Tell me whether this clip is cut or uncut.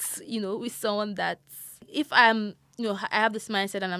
cut